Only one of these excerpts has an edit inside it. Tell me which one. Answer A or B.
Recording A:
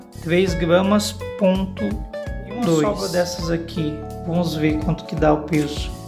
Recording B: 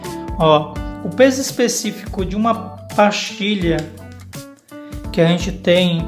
A